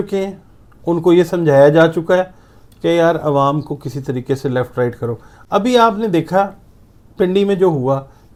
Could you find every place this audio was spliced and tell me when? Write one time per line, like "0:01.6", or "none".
none